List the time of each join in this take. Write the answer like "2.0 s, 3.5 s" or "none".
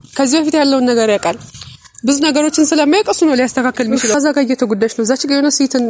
4.1 s